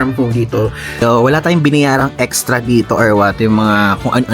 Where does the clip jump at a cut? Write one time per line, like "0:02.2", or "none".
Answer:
0:01.0